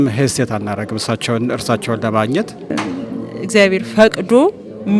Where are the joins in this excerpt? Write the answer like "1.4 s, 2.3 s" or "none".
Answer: 2.7 s